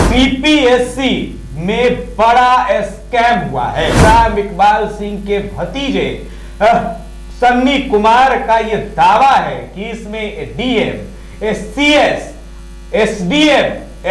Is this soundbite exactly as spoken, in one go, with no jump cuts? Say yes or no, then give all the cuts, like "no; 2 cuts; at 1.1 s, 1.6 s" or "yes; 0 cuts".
no; 1 cut; at 4.0 s